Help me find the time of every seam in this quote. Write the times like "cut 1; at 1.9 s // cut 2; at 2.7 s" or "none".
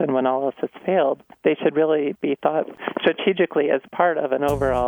cut 1; at 1.3 s // cut 2; at 2.7 s